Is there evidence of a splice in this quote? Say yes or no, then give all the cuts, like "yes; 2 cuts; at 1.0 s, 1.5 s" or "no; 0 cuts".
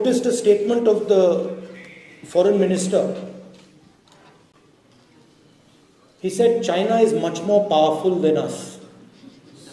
no; 0 cuts